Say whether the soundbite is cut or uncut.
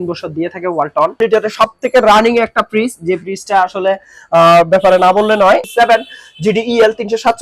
cut